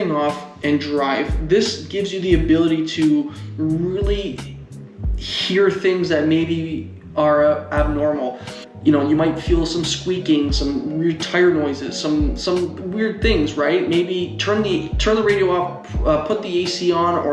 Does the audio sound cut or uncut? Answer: uncut